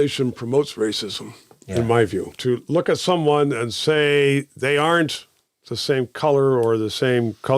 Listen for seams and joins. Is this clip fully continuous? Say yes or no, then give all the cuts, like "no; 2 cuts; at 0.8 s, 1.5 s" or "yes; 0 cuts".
no; 1 cut; at 2.3 s